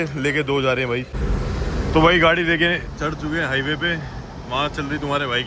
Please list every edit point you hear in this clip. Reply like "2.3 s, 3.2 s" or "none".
1.2 s